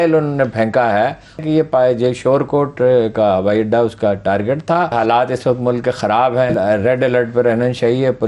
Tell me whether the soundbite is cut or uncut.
cut